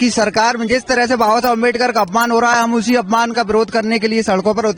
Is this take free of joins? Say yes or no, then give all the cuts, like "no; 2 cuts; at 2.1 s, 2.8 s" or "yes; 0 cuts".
yes; 0 cuts